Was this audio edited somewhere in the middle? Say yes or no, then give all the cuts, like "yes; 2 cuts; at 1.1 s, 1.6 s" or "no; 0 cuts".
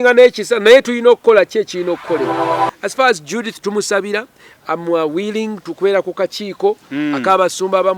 yes; 1 cut; at 2.7 s